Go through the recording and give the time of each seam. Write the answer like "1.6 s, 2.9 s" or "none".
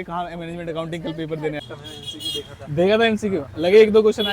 1.6 s